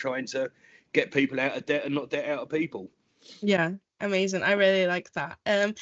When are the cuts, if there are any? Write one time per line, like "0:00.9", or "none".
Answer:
none